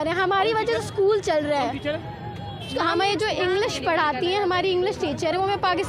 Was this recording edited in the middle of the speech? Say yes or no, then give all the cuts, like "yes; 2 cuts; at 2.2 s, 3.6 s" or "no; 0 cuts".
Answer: no; 0 cuts